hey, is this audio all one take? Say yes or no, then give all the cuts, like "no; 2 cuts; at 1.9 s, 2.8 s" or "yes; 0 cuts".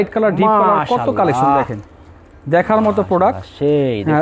yes; 0 cuts